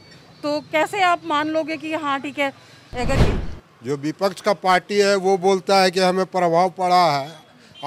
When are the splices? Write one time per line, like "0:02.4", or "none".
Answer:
0:03.2